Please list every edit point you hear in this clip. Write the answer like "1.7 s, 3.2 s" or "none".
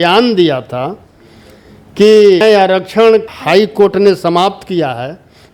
2.4 s